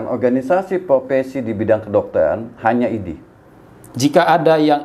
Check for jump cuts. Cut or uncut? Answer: cut